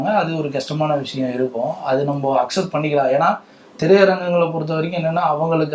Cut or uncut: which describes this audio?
uncut